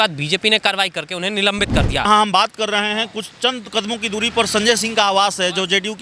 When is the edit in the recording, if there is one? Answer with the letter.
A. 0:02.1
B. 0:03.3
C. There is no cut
A